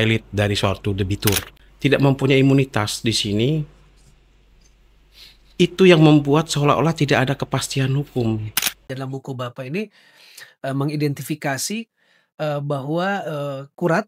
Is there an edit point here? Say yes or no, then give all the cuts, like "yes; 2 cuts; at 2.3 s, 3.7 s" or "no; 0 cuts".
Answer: yes; 2 cuts; at 1.6 s, 8.9 s